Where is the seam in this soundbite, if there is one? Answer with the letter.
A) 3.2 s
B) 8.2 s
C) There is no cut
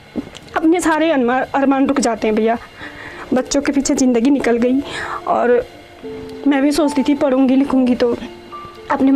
C